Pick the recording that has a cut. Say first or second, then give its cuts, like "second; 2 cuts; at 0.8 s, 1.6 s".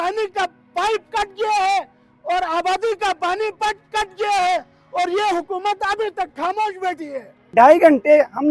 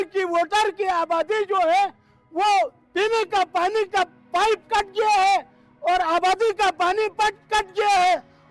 first; 1 cut; at 7.5 s